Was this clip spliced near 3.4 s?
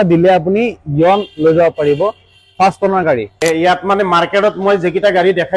yes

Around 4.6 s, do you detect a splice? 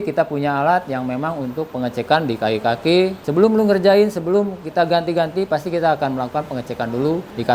no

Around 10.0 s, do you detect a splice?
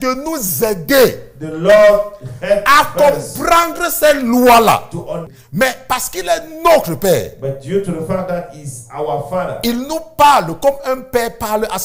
no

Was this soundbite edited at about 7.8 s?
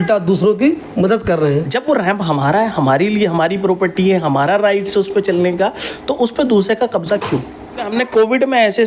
yes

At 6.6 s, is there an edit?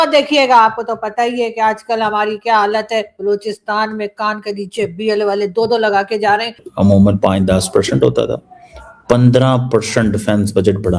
yes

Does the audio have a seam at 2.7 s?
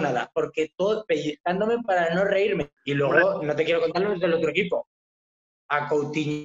yes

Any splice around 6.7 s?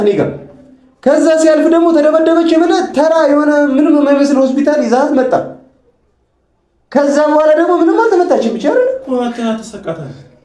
no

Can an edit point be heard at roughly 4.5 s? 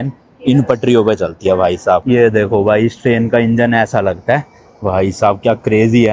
no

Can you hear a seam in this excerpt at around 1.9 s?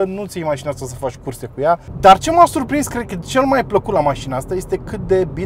yes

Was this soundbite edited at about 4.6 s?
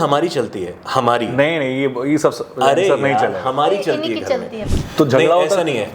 yes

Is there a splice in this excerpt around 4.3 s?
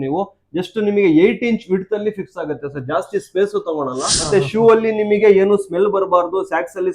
yes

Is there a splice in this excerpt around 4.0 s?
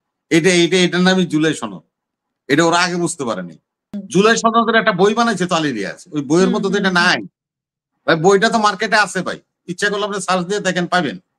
yes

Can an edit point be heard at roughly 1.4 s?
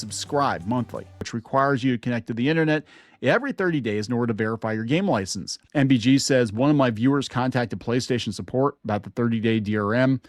yes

